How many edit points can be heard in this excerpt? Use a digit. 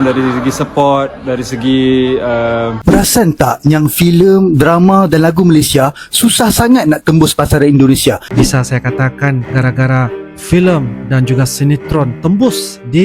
2